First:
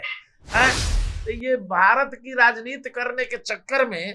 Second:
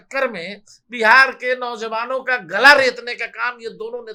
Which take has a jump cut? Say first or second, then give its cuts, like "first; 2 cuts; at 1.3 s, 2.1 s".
first; 1 cut; at 1.1 s